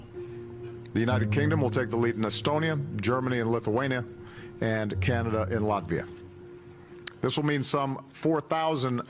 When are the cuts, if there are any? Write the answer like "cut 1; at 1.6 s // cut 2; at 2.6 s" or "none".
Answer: cut 1; at 6.8 s